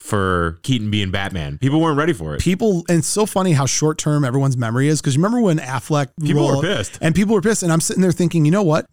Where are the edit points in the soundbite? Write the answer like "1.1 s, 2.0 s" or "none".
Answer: 6.1 s